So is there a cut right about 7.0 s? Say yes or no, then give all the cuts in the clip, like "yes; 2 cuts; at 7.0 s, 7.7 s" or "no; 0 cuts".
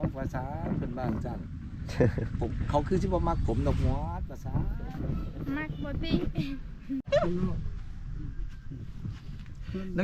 yes; 1 cut; at 7.0 s